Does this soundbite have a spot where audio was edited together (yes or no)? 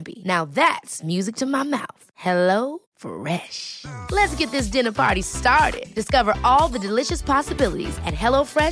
no